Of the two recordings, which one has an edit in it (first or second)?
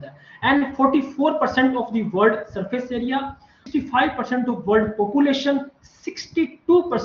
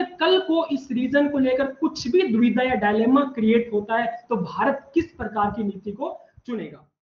first